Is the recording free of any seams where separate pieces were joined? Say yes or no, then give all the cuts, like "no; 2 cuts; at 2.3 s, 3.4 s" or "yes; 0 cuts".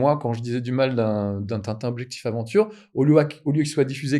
yes; 0 cuts